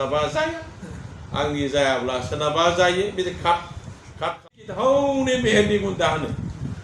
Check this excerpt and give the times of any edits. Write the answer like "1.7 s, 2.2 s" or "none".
4.4 s

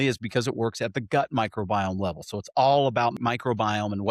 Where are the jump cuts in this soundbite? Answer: 3.2 s

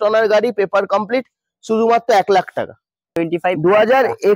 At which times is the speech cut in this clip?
3.1 s

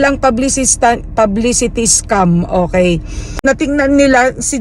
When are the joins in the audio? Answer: 3.4 s

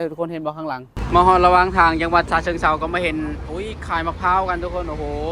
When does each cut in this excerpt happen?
0.9 s

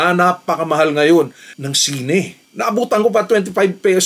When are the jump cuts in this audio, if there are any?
2.4 s

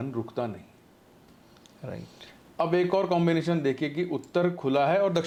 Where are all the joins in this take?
none

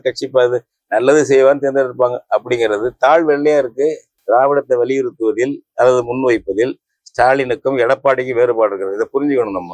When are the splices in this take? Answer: 4.1 s

